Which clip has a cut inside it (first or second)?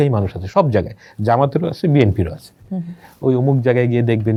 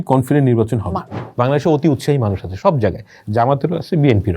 second